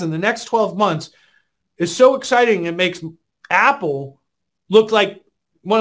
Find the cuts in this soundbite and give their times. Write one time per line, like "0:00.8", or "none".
none